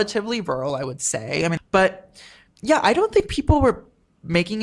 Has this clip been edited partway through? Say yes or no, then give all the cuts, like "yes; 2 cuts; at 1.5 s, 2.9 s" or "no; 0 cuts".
yes; 1 cut; at 1.6 s